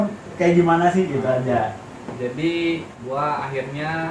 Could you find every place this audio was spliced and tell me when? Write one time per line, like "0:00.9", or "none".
0:02.9